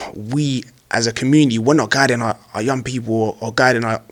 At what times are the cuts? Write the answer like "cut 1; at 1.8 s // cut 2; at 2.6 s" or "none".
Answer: none